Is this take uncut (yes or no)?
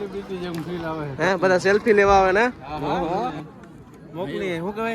no